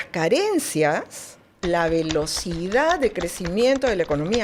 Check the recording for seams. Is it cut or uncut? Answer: uncut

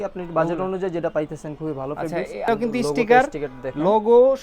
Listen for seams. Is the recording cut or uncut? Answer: cut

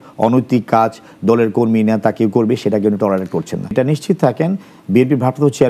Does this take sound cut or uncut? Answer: cut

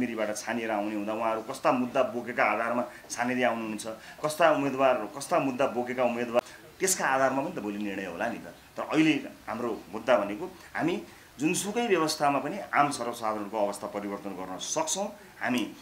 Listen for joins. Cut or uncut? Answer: uncut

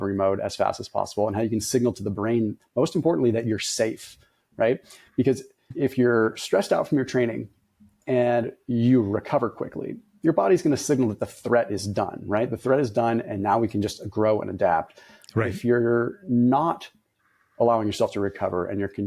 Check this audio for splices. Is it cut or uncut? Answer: cut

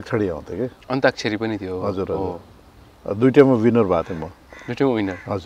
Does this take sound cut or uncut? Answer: uncut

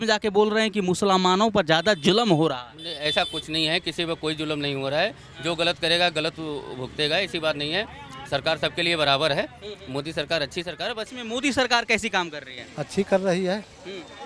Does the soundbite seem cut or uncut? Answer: uncut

